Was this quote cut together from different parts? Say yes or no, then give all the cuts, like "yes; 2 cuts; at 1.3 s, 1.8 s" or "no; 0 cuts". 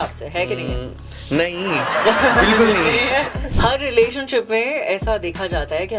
yes; 1 cut; at 3.4 s